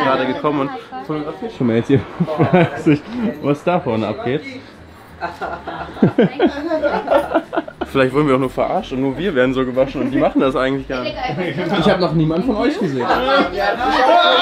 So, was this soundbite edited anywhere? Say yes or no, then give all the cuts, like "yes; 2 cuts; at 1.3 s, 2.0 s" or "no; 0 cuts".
yes; 1 cut; at 13.1 s